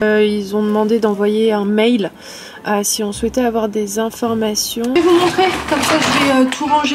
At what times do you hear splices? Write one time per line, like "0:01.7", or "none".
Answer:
0:05.0